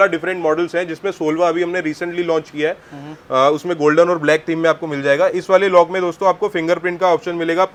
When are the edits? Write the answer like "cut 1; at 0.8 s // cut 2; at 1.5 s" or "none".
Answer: none